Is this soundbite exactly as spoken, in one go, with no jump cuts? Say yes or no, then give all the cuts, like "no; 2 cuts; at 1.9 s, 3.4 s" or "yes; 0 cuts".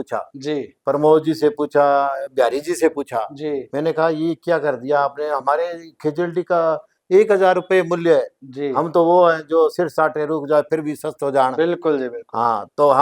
yes; 0 cuts